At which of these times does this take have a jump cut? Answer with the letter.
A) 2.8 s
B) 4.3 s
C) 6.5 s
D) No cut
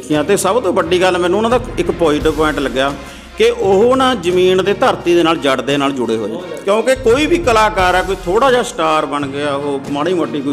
C